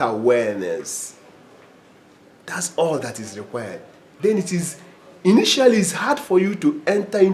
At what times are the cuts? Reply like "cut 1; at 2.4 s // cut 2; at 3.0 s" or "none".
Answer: none

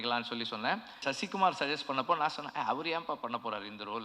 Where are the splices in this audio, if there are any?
cut 1; at 1.1 s

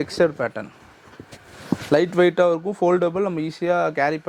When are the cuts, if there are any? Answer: none

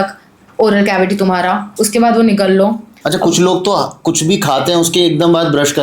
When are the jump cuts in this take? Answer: cut 1; at 2.9 s

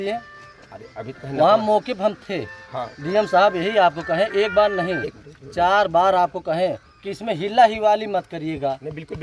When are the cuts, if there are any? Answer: none

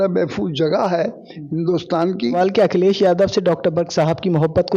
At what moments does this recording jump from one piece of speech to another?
cut 1; at 2.3 s

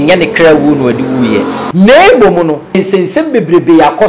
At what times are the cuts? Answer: cut 1; at 1.6 s // cut 2; at 2.8 s

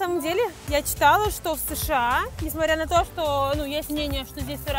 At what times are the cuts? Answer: none

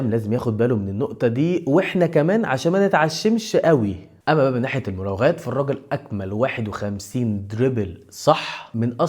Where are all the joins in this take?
cut 1; at 4.0 s

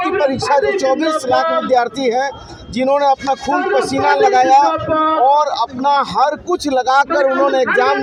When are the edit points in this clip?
none

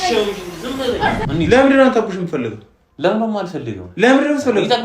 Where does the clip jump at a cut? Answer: cut 1; at 1.2 s

